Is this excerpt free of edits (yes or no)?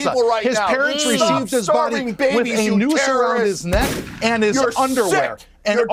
yes